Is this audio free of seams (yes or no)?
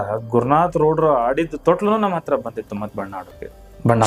yes